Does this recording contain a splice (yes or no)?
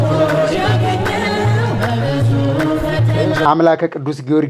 yes